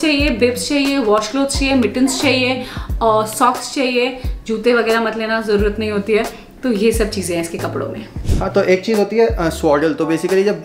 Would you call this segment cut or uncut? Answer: uncut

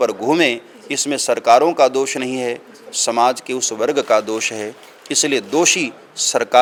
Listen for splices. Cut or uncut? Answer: uncut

